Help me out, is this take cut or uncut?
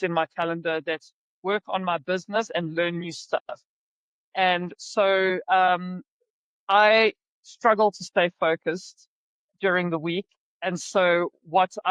uncut